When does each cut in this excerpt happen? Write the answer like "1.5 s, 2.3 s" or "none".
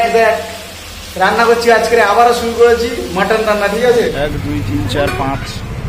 4.1 s